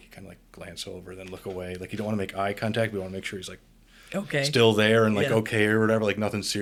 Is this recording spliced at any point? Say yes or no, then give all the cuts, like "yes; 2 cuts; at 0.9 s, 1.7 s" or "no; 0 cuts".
no; 0 cuts